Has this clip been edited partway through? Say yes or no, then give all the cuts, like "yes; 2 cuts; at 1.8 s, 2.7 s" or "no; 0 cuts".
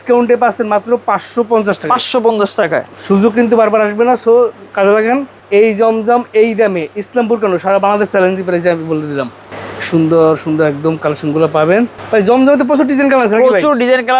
no; 0 cuts